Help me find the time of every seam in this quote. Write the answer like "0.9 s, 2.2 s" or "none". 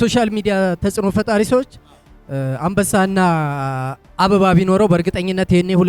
none